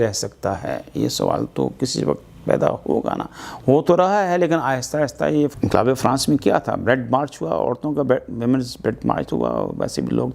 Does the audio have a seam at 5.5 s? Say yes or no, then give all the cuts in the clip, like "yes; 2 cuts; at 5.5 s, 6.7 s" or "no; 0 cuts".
yes; 1 cut; at 5.5 s